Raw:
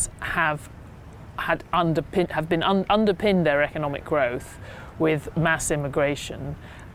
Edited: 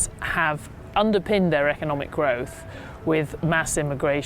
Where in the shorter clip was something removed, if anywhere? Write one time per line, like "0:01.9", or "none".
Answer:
0:00.9